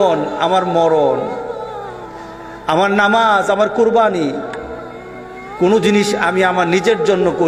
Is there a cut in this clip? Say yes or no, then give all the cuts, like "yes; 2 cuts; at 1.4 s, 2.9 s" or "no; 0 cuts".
no; 0 cuts